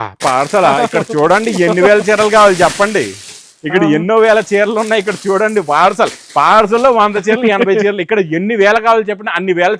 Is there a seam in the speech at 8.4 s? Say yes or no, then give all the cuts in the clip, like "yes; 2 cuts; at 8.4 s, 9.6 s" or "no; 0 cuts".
no; 0 cuts